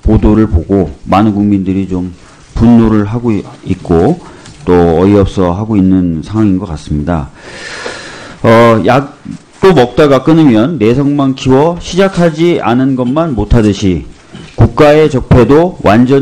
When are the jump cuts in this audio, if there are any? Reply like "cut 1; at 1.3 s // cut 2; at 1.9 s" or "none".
none